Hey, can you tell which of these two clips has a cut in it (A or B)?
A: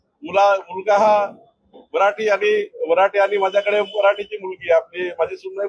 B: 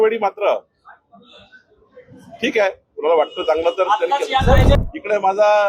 B